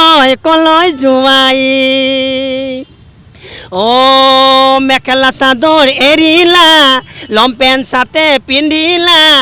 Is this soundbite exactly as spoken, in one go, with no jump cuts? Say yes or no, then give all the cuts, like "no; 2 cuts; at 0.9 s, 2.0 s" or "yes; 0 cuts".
yes; 0 cuts